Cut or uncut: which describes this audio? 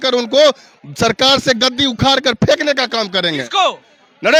uncut